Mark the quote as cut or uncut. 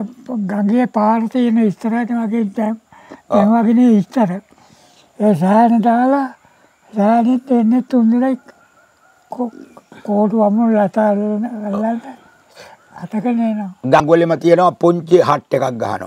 cut